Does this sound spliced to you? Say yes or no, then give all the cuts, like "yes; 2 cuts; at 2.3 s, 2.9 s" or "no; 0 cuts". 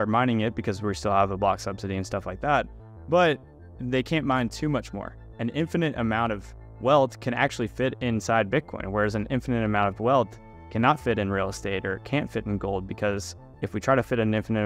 no; 0 cuts